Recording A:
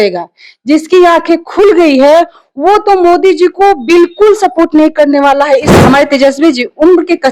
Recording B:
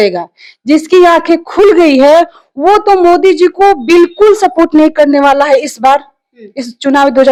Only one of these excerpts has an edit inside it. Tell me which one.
A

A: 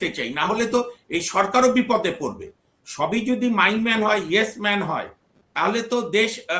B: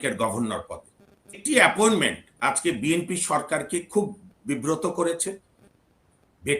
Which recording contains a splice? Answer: B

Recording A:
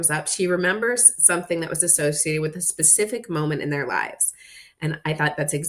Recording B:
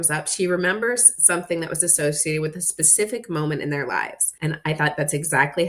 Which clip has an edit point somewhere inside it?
B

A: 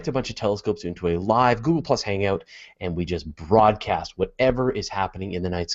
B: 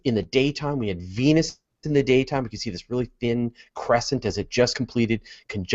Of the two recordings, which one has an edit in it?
B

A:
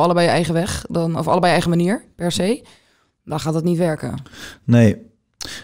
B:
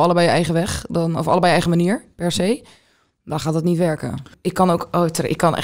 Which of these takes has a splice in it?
B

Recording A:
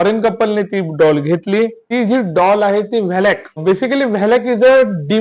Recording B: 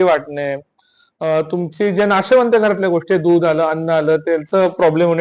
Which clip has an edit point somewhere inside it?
A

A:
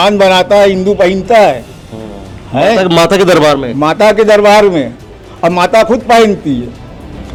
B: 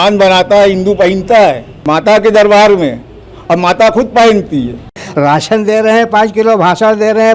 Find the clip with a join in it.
B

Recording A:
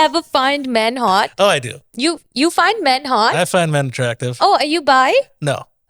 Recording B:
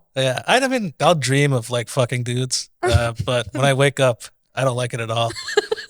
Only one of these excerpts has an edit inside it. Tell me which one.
B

